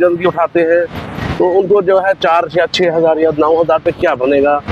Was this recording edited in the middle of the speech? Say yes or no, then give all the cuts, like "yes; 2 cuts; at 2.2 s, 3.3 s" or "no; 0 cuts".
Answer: no; 0 cuts